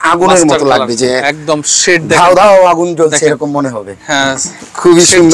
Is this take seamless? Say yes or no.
yes